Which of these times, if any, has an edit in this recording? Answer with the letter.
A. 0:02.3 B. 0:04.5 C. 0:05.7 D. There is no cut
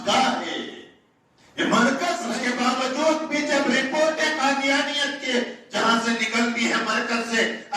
A